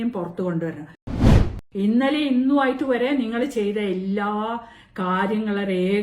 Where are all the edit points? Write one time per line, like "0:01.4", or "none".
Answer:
0:01.2